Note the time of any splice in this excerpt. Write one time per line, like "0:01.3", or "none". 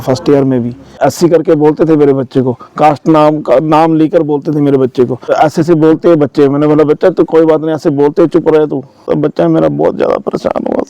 0:01.0
0:05.3
0:09.0

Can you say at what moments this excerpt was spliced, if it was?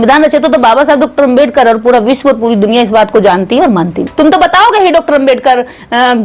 0:04.0

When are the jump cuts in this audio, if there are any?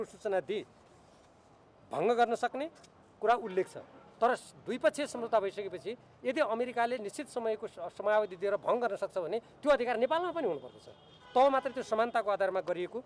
none

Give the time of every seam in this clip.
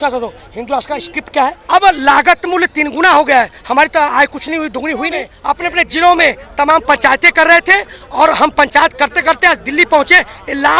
0:01.6
0:05.3

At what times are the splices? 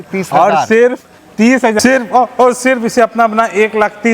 0:01.8

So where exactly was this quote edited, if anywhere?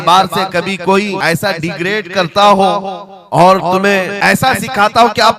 0:01.2
0:04.1

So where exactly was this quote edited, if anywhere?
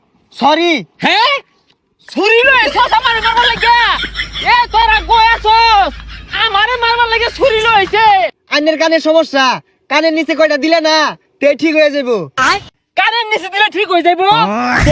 0:08.4
0:12.6

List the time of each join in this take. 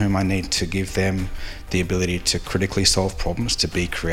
none

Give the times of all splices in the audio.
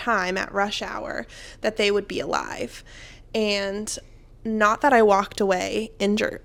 none

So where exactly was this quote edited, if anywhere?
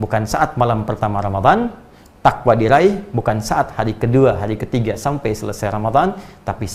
none

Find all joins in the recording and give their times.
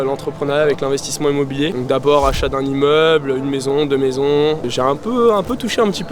none

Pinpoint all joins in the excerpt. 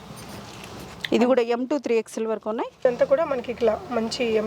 0:02.9

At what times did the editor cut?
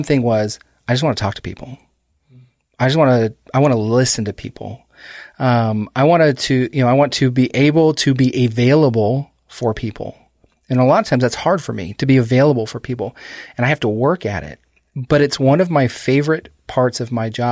none

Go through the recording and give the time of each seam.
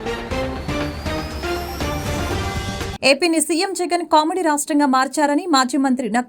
0:02.9

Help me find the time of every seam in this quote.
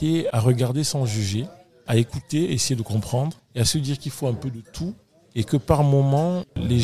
none

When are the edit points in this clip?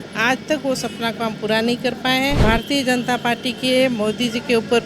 0:02.4

